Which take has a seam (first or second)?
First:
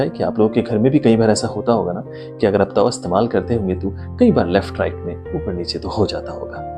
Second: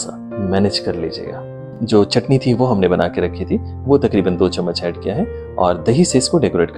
second